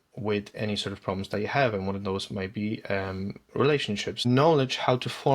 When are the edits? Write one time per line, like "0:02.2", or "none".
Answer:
0:04.2